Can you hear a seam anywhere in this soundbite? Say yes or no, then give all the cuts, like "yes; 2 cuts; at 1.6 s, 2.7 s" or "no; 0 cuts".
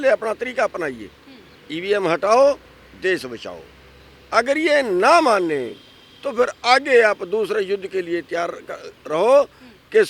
no; 0 cuts